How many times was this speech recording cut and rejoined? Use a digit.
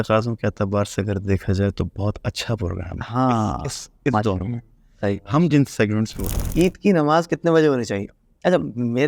1